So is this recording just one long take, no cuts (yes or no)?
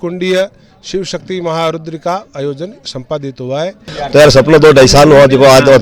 no